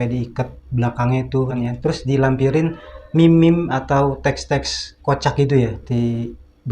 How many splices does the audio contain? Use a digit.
2